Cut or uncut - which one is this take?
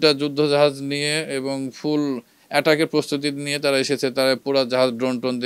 uncut